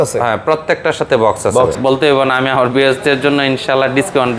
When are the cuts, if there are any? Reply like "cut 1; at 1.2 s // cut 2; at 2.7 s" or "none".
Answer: cut 1; at 1.7 s